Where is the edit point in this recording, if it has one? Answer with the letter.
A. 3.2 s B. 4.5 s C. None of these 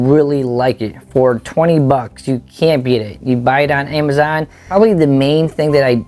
B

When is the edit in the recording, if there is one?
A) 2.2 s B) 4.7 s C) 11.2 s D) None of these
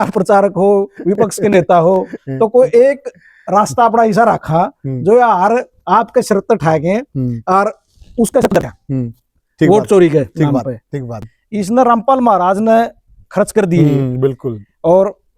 C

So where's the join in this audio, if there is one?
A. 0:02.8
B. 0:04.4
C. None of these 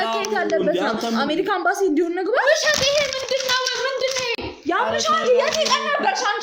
C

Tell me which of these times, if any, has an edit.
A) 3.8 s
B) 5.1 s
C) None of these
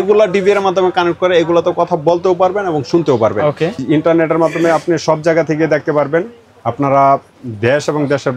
A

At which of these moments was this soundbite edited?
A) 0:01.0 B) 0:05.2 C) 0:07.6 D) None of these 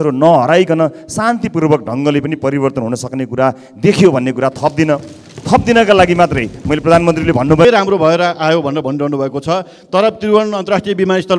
C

